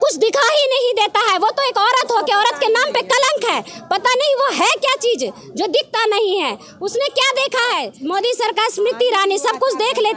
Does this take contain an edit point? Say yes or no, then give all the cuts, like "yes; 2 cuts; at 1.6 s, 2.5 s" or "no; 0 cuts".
yes; 1 cut; at 7.9 s